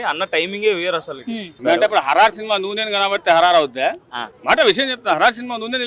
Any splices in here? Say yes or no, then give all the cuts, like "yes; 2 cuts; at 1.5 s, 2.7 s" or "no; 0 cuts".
yes; 1 cut; at 1.6 s